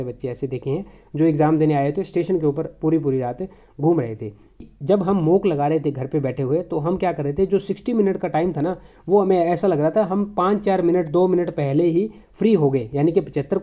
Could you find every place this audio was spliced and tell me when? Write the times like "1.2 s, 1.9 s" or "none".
4.7 s